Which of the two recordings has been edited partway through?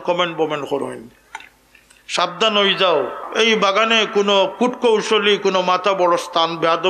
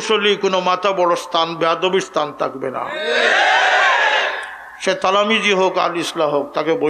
first; 1 cut; at 3.2 s

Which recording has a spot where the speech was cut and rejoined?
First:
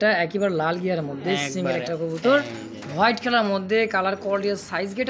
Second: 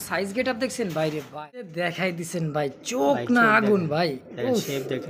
second; 1 cut; at 1.7 s

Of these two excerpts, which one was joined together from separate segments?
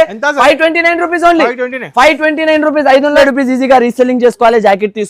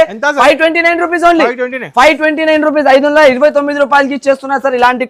first; 1 cut; at 3.2 s

